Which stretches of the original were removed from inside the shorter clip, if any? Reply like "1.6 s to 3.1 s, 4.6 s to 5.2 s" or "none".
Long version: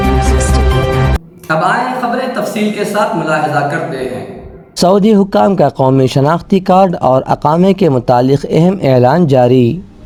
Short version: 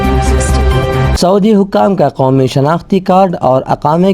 1.1 s to 4.7 s

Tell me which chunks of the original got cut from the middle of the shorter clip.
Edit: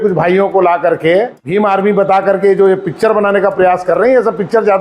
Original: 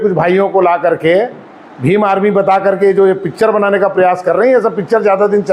1.4 s to 1.8 s

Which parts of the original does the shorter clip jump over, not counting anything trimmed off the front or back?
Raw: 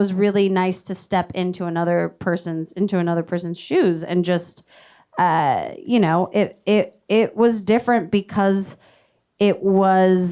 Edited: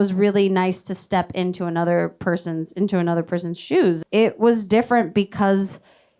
4.0 s to 7.0 s

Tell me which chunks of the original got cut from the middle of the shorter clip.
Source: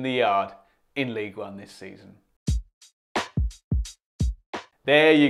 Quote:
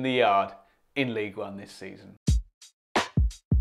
2.1 s to 2.3 s

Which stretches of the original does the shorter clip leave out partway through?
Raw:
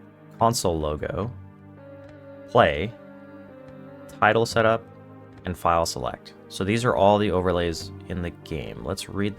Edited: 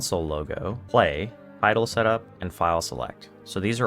1.3 s to 2.4 s, 3.0 s to 4.0 s, 5.0 s to 5.4 s

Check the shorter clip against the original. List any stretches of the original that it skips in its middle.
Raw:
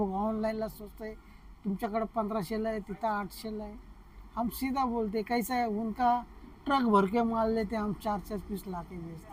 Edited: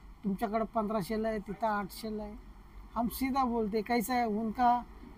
none

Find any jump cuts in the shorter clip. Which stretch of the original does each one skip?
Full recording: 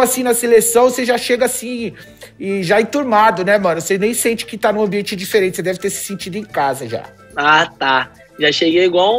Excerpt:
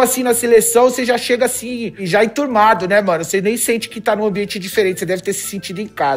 2.0 s to 2.6 s

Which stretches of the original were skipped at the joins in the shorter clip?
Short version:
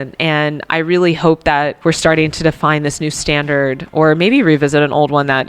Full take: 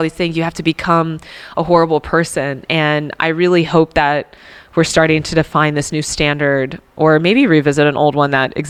4.2 s to 4.7 s, 6.8 s to 6.9 s

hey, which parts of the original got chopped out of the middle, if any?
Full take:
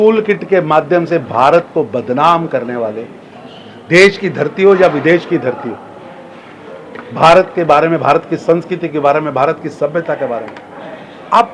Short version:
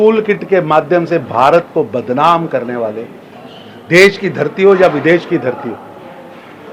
none

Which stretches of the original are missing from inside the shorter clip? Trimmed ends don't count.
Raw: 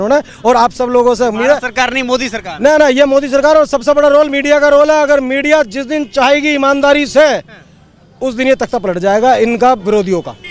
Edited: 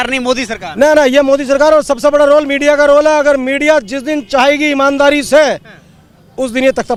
none

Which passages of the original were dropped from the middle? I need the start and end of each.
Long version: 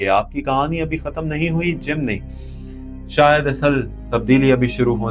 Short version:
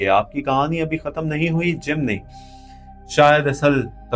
none

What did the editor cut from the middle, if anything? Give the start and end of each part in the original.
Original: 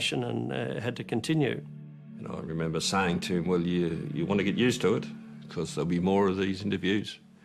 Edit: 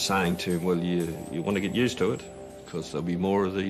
none

